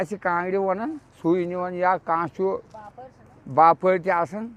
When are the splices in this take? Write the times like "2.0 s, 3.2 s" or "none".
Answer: none